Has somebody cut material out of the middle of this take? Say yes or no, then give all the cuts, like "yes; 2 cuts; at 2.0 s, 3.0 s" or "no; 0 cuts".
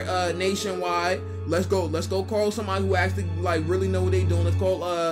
no; 0 cuts